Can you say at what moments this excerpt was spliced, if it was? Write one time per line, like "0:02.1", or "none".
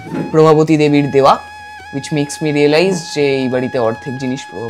none